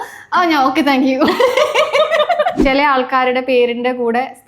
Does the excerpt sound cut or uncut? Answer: cut